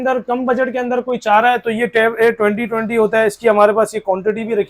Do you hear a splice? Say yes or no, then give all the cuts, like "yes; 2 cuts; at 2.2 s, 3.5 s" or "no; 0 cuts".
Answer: no; 0 cuts